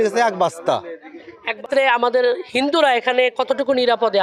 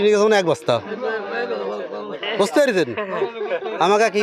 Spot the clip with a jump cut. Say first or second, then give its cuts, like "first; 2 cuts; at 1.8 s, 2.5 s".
first; 1 cut; at 1.6 s